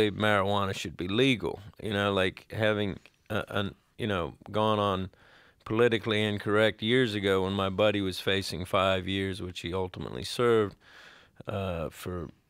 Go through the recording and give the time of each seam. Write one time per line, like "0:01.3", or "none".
0:03.5